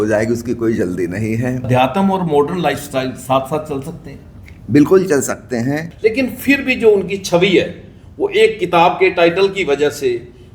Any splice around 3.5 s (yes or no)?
no